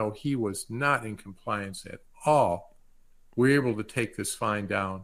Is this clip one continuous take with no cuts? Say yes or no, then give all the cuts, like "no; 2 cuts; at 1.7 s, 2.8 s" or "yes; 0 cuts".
yes; 0 cuts